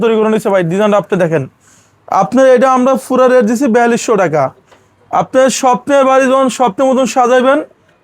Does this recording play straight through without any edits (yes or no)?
yes